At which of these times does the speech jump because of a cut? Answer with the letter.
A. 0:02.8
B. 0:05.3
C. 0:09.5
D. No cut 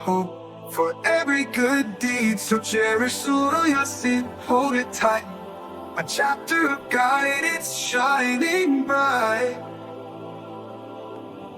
C